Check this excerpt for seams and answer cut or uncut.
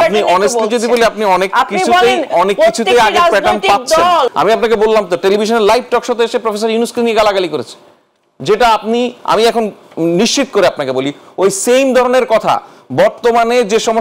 cut